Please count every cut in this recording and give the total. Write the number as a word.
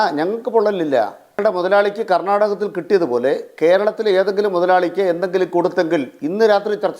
one